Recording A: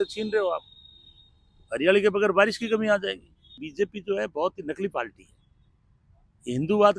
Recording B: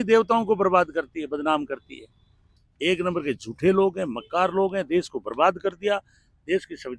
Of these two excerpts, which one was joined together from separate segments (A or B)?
A